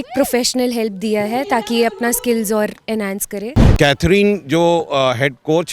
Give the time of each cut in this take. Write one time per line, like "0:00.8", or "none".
0:03.6